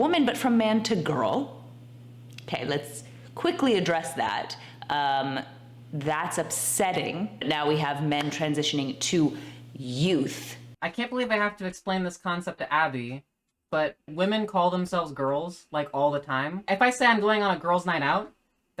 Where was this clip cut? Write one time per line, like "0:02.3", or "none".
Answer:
0:07.4
0:16.6